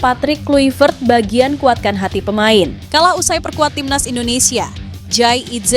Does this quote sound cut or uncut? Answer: cut